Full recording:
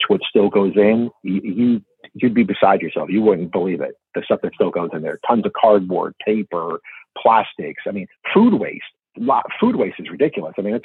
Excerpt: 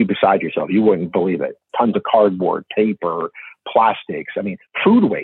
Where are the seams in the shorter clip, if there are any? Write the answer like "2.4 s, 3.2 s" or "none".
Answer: 1.6 s